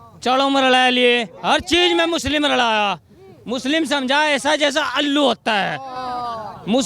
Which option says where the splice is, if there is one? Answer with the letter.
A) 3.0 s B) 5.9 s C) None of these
C